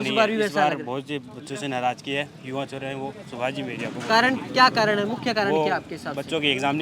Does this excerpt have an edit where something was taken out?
no; 0 cuts

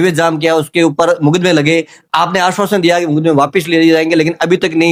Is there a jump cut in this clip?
no; 0 cuts

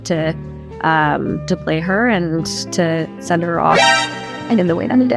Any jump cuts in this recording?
no; 0 cuts

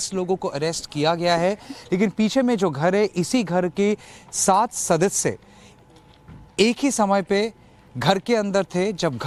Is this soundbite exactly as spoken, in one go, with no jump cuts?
yes; 0 cuts

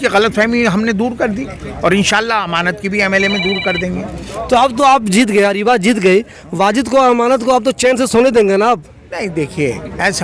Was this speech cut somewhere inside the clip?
no; 0 cuts

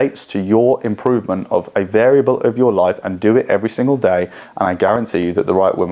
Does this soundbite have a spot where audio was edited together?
no; 0 cuts

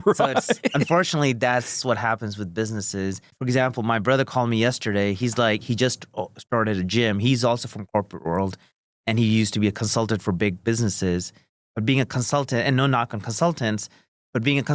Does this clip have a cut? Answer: yes; 1 cut; at 3.3 s

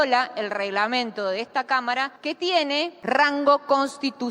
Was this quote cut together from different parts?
yes; 2 cuts; at 2.1 s, 3.0 s

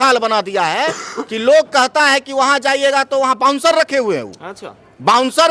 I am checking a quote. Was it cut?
no; 0 cuts

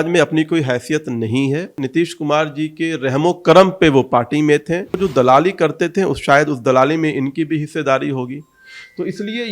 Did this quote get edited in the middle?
yes; 2 cuts; at 1.8 s, 5.0 s

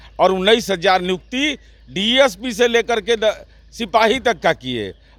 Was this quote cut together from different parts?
no; 0 cuts

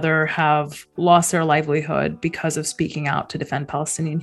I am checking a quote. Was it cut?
no; 0 cuts

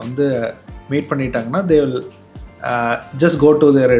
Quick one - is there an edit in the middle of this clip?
no; 0 cuts

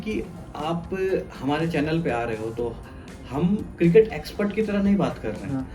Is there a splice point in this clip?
no; 0 cuts

